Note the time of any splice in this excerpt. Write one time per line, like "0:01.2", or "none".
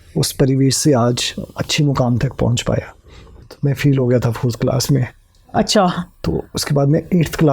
0:03.3